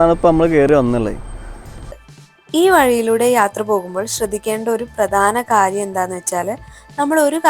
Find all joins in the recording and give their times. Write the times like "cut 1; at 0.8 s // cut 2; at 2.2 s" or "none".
cut 1; at 2.0 s